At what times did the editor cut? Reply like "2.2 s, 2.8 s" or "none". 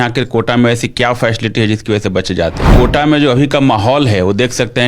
2.7 s